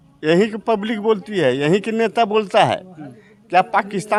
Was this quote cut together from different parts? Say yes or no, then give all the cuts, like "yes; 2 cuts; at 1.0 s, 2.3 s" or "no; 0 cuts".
no; 0 cuts